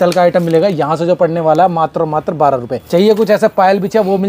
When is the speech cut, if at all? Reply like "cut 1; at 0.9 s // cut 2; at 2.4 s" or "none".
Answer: cut 1; at 2.8 s